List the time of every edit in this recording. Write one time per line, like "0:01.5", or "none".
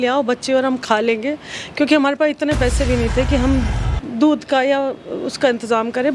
none